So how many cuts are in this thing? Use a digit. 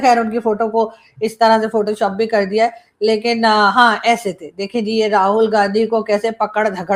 0